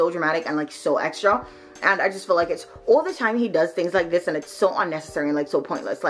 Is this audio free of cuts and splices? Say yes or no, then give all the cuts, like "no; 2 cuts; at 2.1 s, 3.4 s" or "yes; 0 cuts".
yes; 0 cuts